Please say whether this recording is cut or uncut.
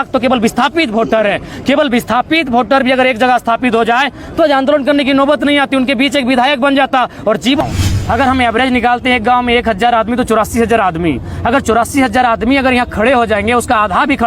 cut